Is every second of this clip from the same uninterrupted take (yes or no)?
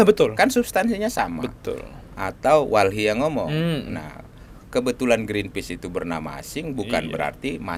yes